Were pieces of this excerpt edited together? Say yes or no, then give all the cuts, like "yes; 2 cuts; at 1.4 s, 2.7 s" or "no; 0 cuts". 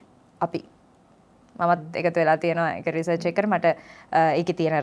no; 0 cuts